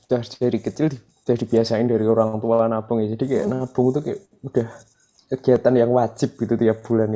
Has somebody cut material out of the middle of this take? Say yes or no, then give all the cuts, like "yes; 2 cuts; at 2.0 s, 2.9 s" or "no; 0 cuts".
no; 0 cuts